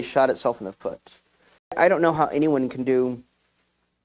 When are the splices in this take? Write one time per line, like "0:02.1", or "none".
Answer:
0:01.8